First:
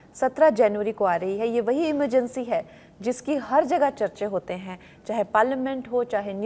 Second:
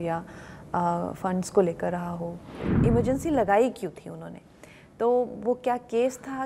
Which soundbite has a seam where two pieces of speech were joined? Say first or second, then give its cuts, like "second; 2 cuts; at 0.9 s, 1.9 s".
second; 1 cut; at 2.7 s